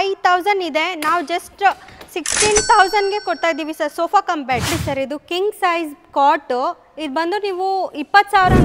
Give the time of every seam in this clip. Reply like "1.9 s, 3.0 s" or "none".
4.7 s